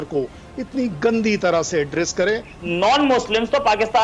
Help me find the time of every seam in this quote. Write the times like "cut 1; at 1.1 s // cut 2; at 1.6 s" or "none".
cut 1; at 2.5 s